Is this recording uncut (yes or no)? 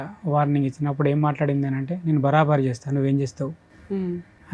yes